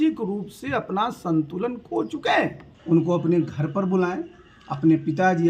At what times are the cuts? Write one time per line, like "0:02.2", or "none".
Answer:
0:02.7